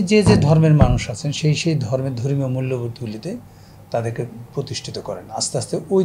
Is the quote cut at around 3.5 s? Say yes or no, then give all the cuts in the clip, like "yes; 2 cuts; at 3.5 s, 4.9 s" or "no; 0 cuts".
no; 0 cuts